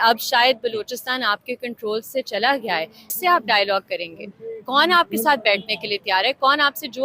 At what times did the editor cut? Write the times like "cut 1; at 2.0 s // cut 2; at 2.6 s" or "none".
cut 1; at 3.0 s